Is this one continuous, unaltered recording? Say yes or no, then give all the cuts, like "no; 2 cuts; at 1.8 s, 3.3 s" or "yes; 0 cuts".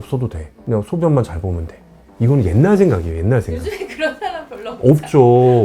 yes; 0 cuts